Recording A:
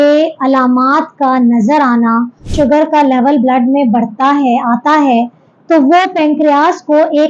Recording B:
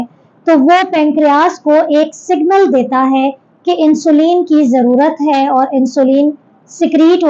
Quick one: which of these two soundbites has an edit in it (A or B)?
A